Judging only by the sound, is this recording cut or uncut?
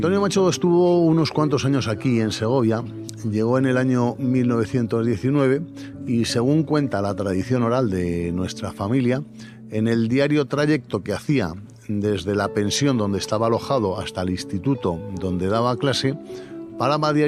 uncut